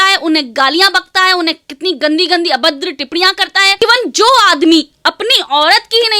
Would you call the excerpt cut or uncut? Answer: cut